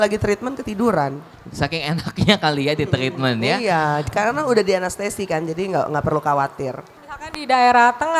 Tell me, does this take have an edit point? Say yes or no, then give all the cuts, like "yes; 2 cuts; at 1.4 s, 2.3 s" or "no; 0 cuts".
yes; 1 cut; at 6.9 s